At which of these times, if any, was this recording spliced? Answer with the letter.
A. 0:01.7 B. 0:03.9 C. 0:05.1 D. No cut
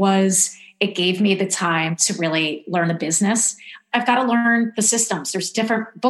B